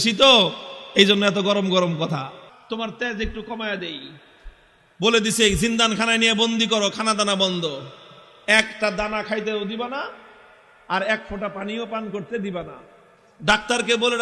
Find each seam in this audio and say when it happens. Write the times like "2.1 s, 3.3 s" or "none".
2.5 s

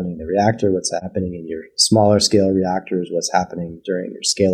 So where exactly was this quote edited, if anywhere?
1.0 s

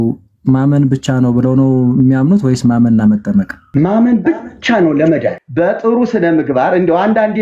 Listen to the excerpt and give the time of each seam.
3.6 s, 5.4 s

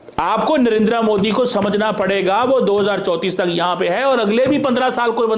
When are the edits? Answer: none

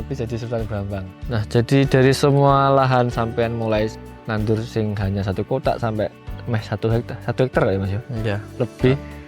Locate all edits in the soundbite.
1.1 s

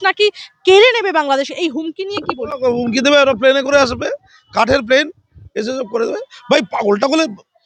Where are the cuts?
none

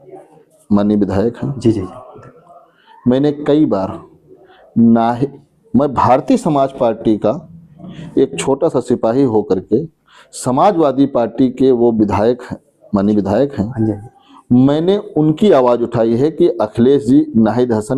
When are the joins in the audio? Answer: none

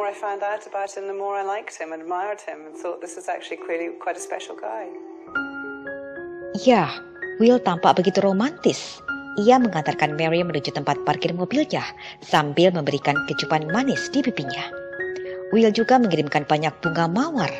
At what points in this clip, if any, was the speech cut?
none

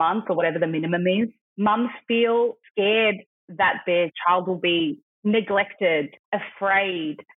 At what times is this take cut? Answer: 1.4 s, 2.6 s, 5.1 s, 6.2 s

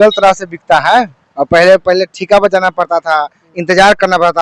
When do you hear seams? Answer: none

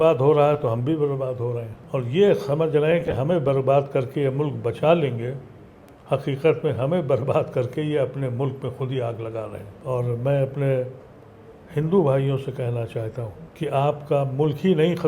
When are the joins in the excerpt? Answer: 1.7 s, 9.7 s, 13.4 s

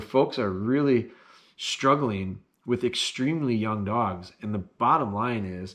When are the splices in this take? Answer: none

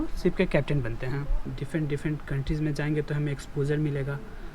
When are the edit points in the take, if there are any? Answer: 1.6 s

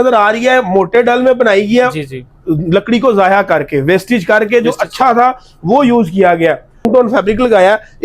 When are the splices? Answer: 6.9 s

